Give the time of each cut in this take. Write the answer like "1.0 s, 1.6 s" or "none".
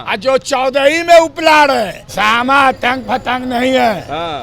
2.0 s